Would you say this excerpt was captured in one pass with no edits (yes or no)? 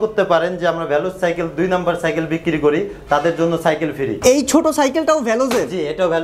no